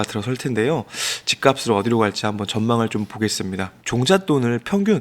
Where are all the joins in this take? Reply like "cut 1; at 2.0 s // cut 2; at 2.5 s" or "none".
cut 1; at 3.9 s